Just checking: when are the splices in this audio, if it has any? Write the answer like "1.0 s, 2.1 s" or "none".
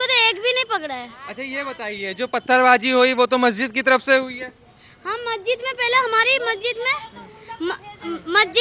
none